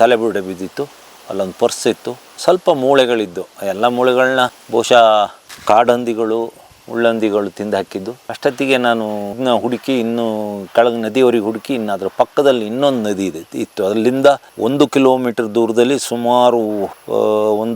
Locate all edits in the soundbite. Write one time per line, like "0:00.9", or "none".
none